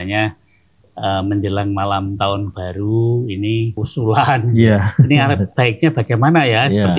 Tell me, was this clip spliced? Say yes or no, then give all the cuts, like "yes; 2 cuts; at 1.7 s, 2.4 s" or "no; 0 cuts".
no; 0 cuts